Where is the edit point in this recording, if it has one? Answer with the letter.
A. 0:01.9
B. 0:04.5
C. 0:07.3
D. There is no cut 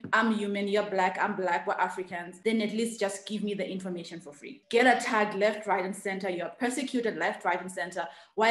B